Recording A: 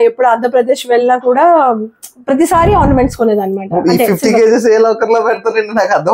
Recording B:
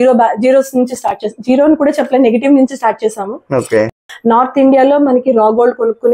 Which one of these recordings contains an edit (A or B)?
B